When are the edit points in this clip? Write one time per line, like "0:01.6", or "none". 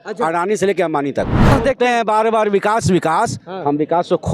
0:01.5